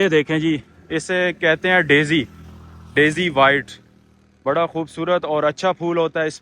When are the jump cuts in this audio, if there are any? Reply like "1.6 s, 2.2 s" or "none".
none